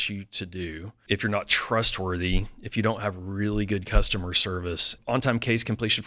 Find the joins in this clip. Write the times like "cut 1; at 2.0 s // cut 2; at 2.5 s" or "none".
cut 1; at 1.0 s // cut 2; at 4.9 s